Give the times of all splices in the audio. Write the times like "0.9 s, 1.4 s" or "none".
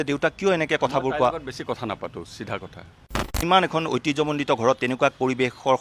3.3 s